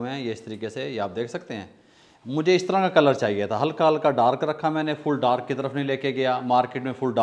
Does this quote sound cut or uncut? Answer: uncut